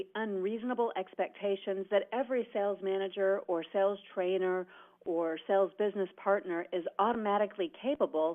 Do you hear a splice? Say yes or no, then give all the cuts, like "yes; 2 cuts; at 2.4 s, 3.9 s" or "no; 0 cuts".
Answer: yes; 1 cut; at 5.6 s